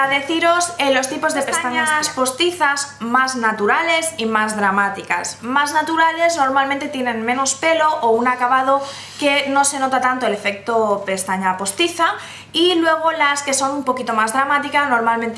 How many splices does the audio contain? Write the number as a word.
one